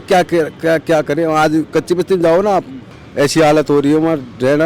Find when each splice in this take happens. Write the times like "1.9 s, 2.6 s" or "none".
none